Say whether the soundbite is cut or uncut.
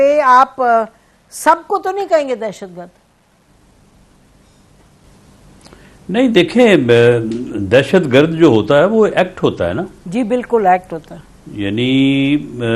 uncut